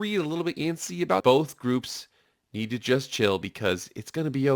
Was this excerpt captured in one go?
no; 1 cut; at 1.2 s

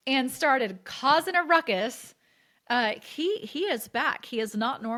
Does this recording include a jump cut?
no; 0 cuts

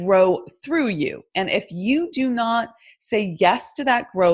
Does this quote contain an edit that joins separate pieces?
no; 0 cuts

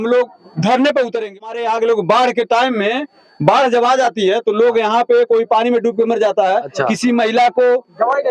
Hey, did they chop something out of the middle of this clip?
yes; 1 cut; at 1.4 s

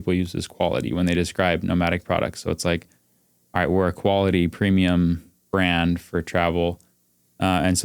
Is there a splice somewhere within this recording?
no; 0 cuts

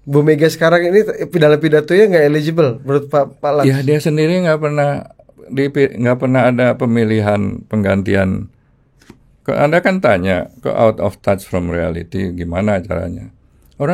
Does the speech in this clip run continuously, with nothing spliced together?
yes; 0 cuts

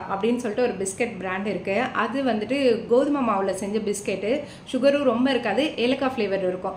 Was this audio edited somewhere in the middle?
no; 0 cuts

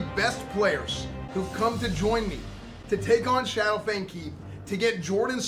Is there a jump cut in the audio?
no; 0 cuts

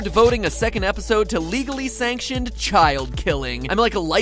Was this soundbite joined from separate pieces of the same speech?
yes; 1 cut; at 2.4 s

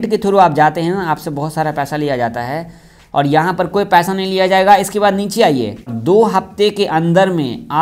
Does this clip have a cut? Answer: yes; 1 cut; at 5.9 s

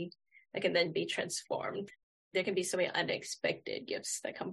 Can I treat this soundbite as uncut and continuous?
no; 1 cut; at 1.9 s

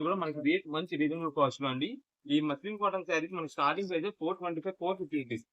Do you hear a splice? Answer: no; 0 cuts

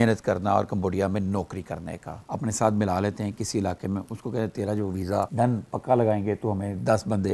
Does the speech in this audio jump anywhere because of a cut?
yes; 1 cut; at 2.2 s

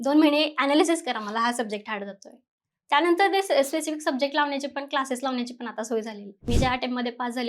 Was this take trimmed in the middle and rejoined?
yes; 1 cut; at 6.3 s

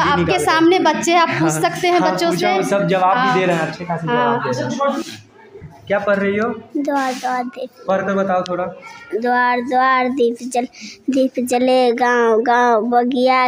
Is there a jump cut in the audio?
yes; 1 cut; at 5.0 s

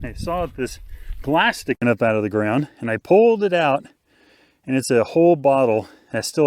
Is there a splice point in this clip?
no; 0 cuts

